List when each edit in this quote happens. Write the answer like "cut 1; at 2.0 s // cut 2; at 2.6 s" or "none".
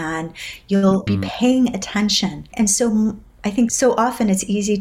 cut 1; at 1.0 s // cut 2; at 2.5 s // cut 3; at 3.7 s